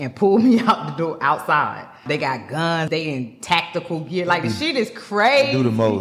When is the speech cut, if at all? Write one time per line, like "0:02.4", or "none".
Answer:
0:02.0
0:02.9